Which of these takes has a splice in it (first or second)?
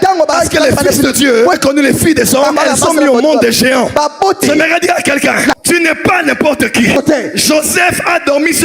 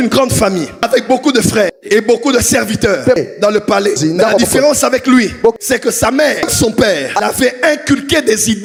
first